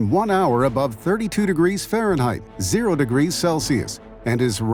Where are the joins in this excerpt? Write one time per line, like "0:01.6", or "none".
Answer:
none